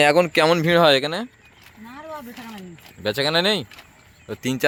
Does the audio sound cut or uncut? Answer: uncut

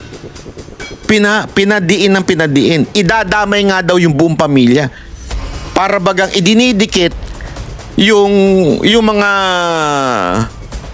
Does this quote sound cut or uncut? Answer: uncut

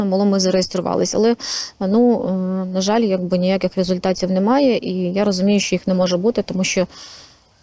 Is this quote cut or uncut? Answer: uncut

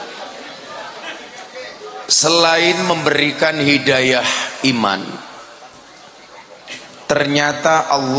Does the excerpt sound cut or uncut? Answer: uncut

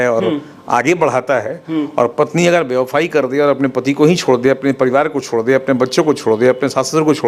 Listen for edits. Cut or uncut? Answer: uncut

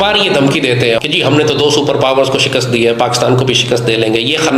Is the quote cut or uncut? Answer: cut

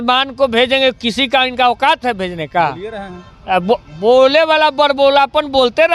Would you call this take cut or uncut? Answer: uncut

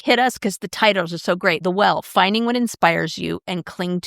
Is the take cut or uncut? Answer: cut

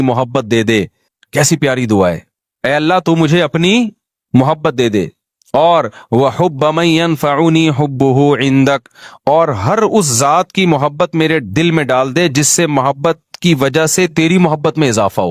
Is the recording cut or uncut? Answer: uncut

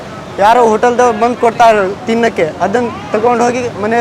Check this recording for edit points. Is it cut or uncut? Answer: uncut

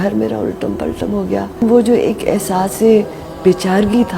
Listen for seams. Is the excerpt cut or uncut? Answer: cut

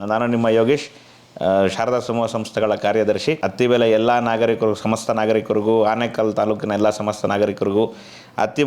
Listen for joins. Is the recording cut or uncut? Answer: cut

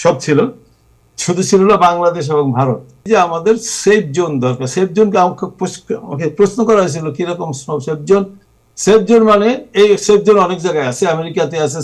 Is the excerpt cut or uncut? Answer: cut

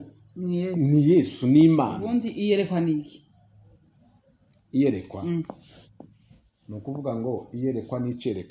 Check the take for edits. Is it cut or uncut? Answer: cut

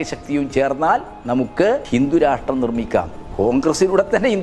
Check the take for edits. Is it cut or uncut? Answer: cut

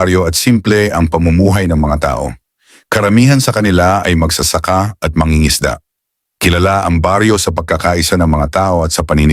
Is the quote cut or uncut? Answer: uncut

